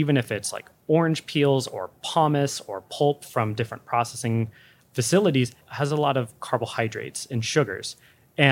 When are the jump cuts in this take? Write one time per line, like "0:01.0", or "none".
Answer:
none